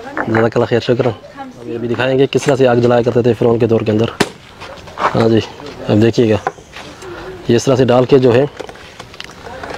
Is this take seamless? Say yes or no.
no